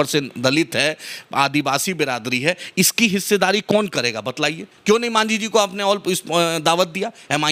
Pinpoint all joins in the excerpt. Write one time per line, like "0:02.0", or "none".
none